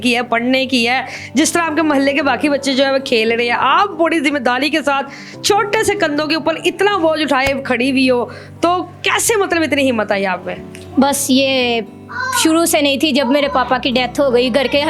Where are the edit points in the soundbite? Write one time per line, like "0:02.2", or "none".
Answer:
none